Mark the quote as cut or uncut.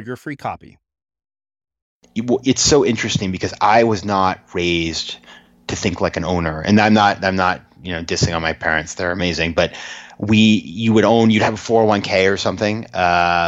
cut